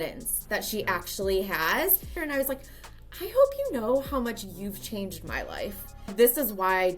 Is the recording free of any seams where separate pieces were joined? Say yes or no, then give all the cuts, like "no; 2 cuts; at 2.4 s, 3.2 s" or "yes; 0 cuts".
no; 2 cuts; at 2.1 s, 6.1 s